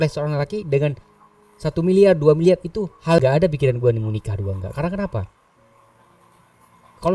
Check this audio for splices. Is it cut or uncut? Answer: cut